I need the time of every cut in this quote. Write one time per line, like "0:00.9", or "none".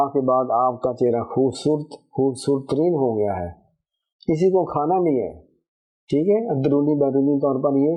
none